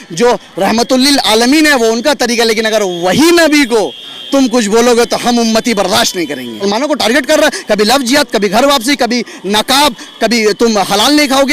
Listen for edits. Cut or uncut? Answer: cut